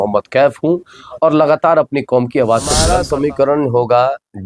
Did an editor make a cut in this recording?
yes; 1 cut; at 2.8 s

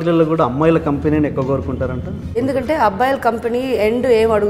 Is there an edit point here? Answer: yes; 1 cut; at 2.3 s

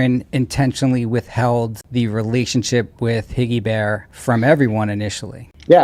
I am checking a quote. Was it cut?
no; 0 cuts

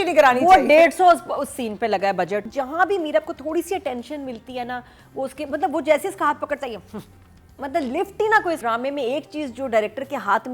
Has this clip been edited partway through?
yes; 2 cuts; at 2.4 s, 8.6 s

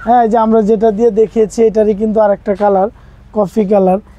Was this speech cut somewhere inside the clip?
no; 0 cuts

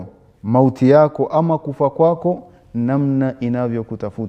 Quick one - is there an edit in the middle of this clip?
no; 0 cuts

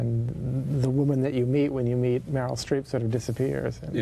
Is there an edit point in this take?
yes; 1 cut; at 1.7 s

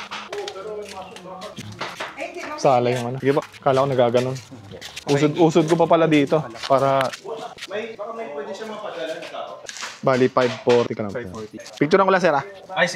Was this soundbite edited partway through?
yes; 3 cuts; at 3.1 s, 7.3 s, 9.8 s

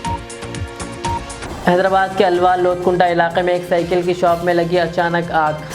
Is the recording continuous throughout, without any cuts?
no; 1 cut; at 1.4 s

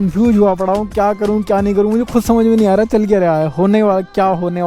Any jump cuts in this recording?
no; 0 cuts

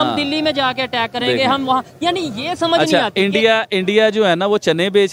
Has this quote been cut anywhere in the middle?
no; 0 cuts

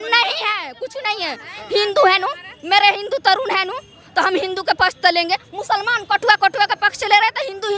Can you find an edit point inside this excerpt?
no; 0 cuts

